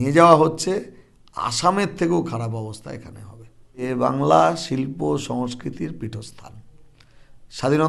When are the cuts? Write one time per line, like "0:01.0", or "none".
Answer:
0:03.8